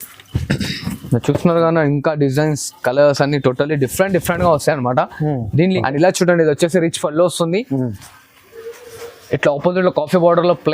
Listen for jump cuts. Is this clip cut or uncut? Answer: cut